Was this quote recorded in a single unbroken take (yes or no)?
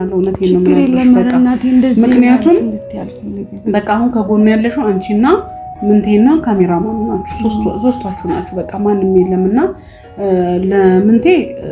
yes